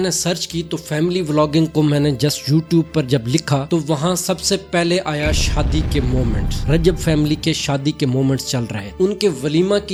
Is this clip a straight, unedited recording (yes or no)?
yes